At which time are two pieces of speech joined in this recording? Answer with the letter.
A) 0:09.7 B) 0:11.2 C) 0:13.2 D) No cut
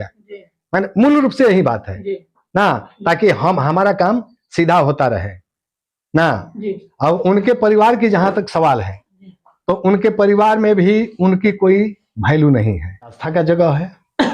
C